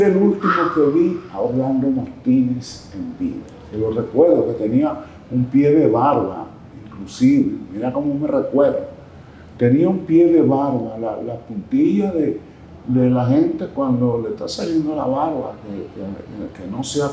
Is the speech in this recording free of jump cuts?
yes; 0 cuts

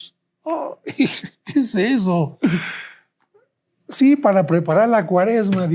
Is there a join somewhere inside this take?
no; 0 cuts

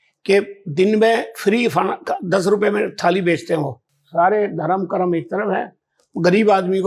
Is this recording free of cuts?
no; 1 cut; at 3.8 s

